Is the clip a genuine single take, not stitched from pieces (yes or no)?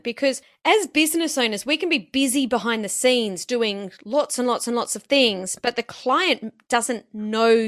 yes